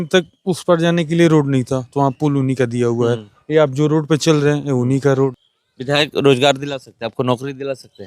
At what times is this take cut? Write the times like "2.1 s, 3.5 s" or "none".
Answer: 5.3 s